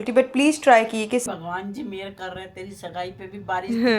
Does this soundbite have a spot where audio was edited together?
yes; 1 cut; at 1.2 s

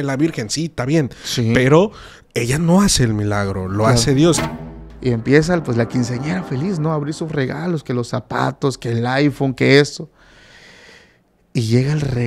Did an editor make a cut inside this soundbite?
yes; 1 cut; at 4.4 s

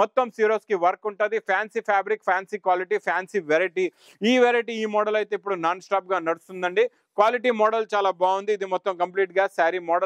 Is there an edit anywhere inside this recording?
no; 0 cuts

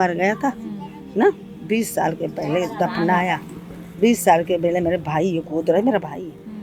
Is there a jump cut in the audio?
no; 0 cuts

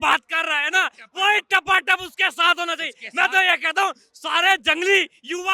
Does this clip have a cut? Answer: no; 0 cuts

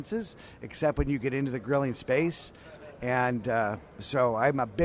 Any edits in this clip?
no; 0 cuts

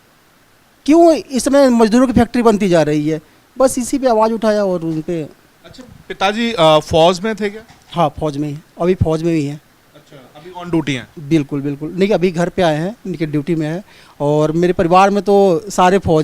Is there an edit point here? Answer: no; 0 cuts

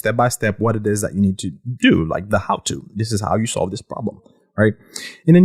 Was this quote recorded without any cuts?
yes; 0 cuts

